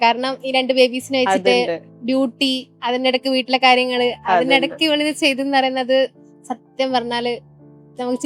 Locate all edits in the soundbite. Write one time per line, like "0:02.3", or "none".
none